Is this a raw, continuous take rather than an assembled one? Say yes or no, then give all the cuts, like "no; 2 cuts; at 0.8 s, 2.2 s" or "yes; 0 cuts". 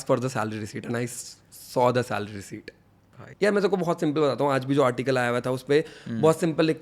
no; 1 cut; at 3.1 s